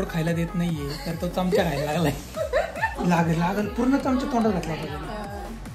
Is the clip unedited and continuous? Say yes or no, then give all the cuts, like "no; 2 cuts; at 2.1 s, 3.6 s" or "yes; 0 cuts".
no; 1 cut; at 3.0 s